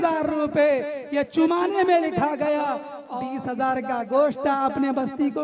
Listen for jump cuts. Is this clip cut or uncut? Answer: cut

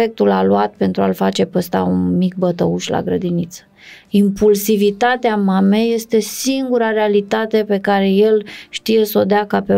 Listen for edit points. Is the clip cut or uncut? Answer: uncut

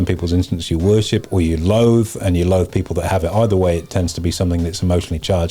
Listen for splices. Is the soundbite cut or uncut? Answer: uncut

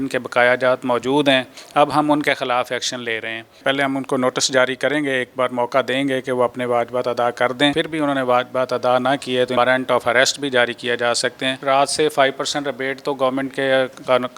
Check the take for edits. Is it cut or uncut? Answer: cut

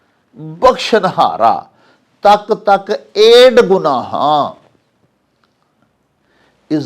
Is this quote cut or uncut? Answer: uncut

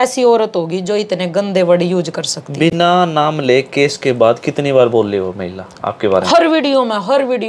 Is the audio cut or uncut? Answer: uncut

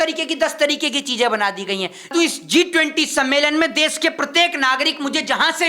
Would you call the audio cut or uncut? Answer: cut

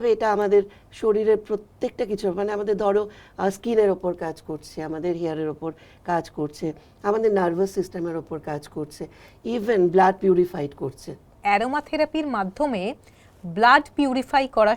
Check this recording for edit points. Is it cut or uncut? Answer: cut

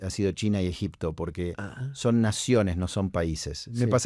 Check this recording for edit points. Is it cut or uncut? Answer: uncut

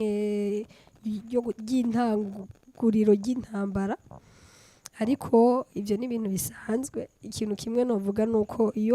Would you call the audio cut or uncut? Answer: uncut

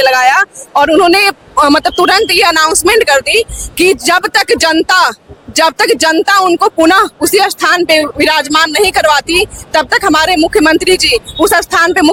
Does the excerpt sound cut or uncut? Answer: uncut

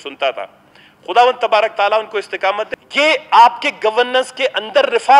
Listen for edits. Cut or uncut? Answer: cut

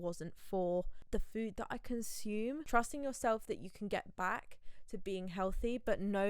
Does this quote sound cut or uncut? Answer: cut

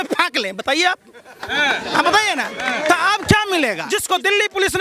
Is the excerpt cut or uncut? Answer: cut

